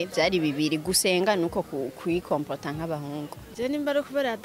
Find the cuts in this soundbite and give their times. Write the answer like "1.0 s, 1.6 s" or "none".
3.4 s